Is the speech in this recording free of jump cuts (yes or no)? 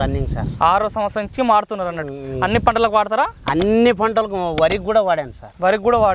yes